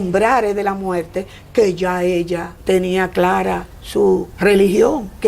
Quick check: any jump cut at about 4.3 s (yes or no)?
yes